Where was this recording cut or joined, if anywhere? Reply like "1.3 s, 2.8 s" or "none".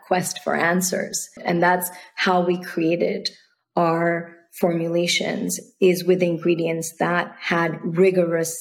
1.4 s